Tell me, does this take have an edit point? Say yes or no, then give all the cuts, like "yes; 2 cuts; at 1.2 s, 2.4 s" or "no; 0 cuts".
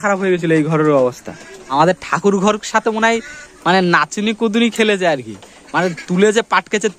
yes; 1 cut; at 1.3 s